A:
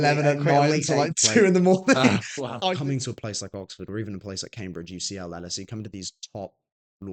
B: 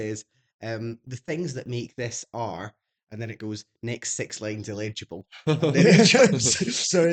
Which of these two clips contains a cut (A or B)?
A